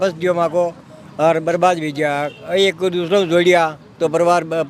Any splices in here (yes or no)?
no